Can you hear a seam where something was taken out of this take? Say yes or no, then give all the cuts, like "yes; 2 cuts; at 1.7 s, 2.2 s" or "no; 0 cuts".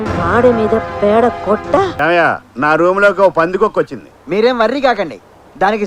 yes; 1 cut; at 2.0 s